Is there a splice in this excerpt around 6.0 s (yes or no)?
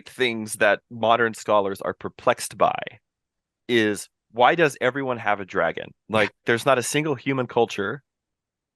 no